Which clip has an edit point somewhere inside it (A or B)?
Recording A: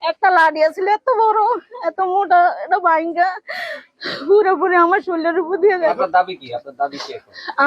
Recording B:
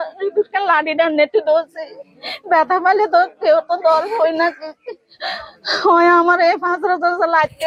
A